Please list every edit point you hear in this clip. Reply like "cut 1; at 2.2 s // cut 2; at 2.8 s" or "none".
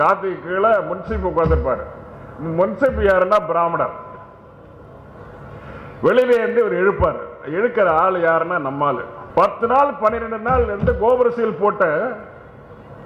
cut 1; at 9.1 s